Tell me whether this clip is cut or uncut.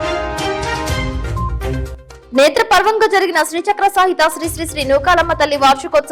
cut